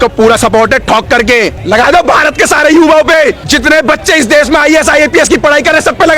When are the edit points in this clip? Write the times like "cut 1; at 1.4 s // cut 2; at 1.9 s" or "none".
cut 1; at 1.6 s // cut 2; at 3.4 s